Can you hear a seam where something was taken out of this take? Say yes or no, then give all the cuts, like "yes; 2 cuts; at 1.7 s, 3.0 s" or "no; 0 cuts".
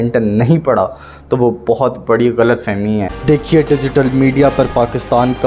yes; 1 cut; at 3.2 s